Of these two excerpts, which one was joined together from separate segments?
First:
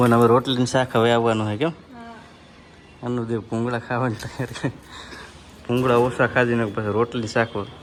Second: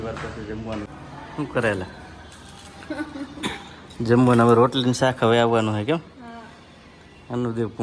second; 1 cut; at 0.9 s

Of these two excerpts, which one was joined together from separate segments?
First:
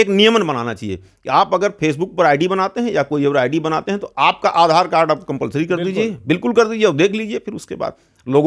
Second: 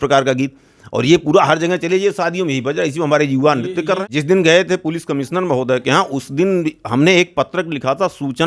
second; 1 cut; at 4.0 s

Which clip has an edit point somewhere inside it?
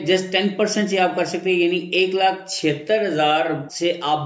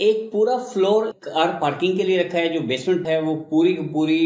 second; 1 cut; at 1.1 s

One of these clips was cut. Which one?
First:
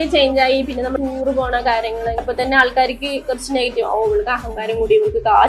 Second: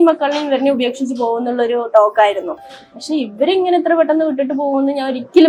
first; 2 cuts; at 0.9 s, 2.2 s

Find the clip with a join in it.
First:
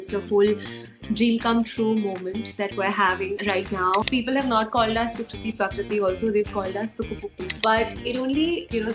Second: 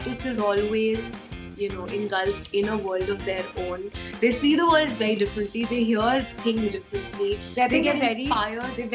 first; 2 cuts; at 4.1 s, 7.5 s

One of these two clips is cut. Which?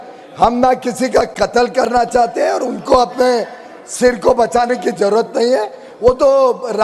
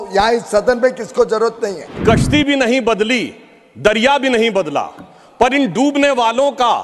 second; 1 cut; at 2.0 s

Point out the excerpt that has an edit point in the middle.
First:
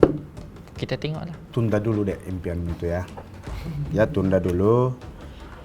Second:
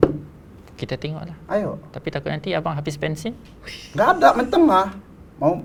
first; 1 cut; at 1.3 s

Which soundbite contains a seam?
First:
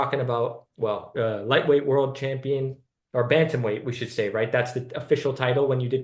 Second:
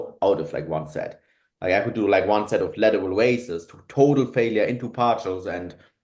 first; 1 cut; at 1.1 s

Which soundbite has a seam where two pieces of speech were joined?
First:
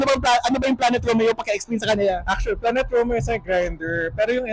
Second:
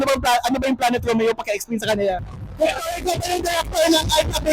second; 1 cut; at 2.3 s

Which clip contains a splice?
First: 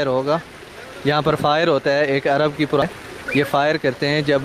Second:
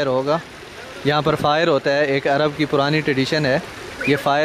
first; 1 cut; at 2.8 s

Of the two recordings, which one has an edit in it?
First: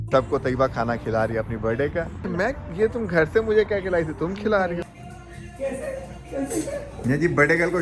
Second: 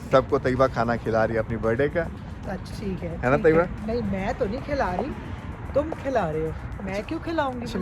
first; 2 cuts; at 2.2 s, 4.9 s

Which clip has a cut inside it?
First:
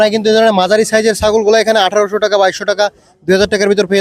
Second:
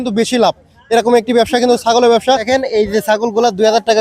second; 1 cut; at 2.4 s

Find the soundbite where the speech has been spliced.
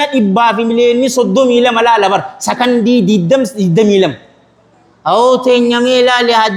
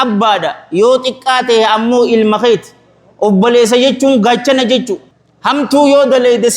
second; 1 cut; at 5.0 s

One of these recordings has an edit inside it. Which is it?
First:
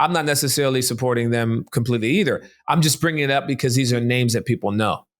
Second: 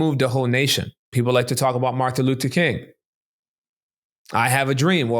second; 1 cut; at 1.1 s

